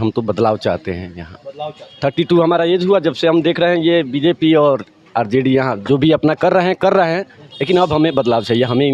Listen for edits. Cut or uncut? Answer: uncut